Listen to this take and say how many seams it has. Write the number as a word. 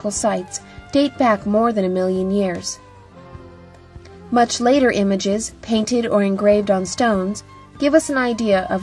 zero